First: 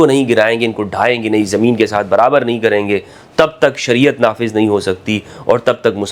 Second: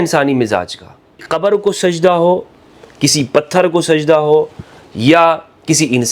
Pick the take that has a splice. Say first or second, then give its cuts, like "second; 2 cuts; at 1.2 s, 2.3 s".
second; 1 cut; at 1.2 s